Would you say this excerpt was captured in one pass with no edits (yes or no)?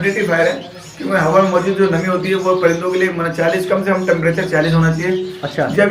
yes